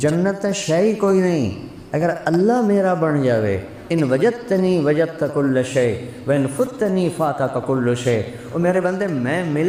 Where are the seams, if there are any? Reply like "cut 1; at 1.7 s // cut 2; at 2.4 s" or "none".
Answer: none